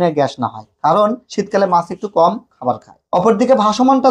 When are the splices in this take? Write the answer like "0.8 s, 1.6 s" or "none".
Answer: 2.9 s